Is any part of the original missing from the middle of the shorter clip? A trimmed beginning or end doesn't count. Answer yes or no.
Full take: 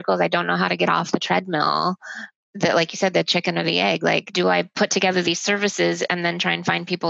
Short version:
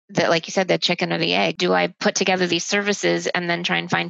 yes